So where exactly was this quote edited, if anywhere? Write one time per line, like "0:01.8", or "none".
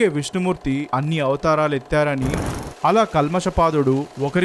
0:02.5